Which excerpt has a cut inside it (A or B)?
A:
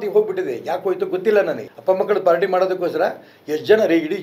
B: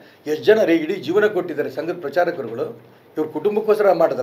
A